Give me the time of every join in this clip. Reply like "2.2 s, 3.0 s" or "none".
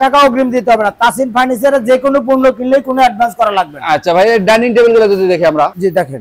none